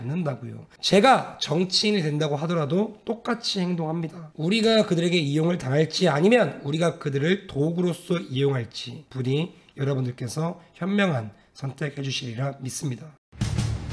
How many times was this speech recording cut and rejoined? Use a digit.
1